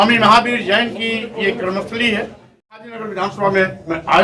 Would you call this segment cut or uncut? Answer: cut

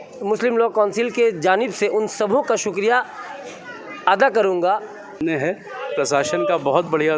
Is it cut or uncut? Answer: cut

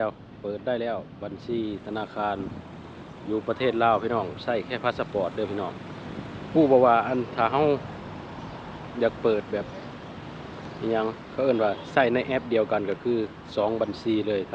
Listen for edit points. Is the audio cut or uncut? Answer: uncut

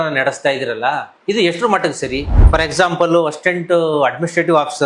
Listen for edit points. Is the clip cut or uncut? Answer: cut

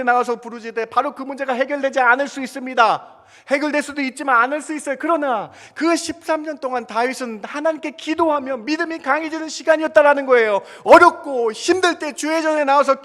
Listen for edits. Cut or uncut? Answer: uncut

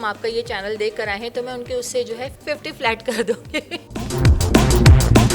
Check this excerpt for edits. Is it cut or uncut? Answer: cut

